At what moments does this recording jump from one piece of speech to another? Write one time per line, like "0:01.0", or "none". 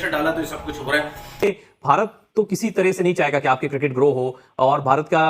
0:01.2